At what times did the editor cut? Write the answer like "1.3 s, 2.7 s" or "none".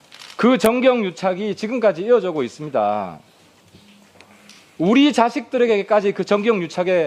none